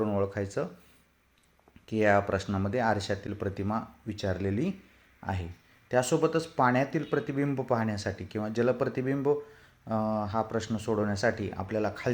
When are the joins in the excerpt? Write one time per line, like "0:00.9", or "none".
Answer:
0:06.5